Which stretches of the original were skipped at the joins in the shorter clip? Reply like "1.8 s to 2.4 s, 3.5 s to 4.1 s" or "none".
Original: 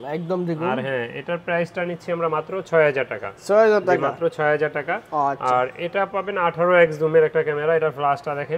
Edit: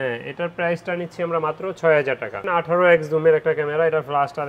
3.3 s to 6.3 s